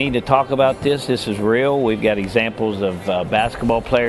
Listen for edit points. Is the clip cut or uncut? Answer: uncut